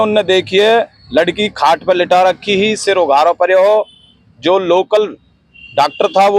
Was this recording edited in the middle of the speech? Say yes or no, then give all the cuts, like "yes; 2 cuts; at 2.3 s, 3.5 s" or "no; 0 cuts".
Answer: no; 0 cuts